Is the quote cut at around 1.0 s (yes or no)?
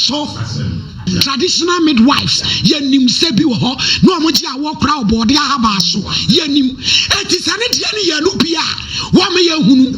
yes